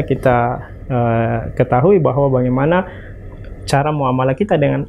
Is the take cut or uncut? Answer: uncut